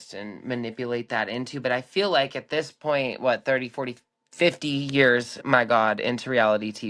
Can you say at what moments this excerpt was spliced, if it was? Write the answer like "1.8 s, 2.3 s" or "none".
none